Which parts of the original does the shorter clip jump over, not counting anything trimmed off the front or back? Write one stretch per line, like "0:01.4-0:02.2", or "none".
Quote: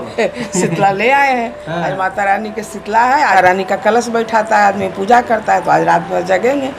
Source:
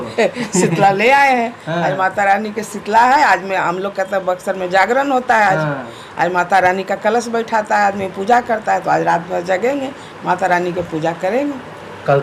0:03.3-0:06.5